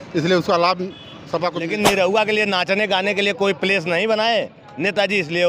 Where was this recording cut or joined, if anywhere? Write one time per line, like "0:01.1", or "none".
0:01.6